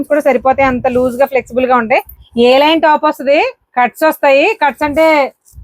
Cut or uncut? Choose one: cut